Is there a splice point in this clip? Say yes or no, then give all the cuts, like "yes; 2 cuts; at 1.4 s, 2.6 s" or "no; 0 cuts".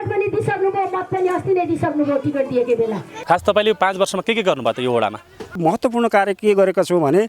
yes; 2 cuts; at 3.1 s, 5.6 s